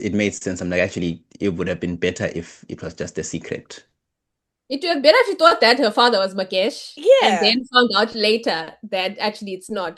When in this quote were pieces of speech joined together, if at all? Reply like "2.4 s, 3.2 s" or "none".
none